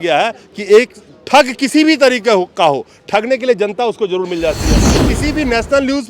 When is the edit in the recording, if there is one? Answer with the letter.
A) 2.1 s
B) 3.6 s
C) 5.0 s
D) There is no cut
C